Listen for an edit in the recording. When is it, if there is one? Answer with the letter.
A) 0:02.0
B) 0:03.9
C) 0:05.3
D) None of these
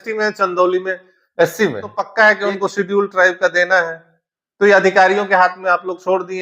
A